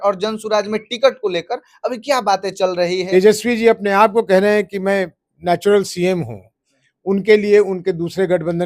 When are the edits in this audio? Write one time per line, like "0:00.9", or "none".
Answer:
0:03.0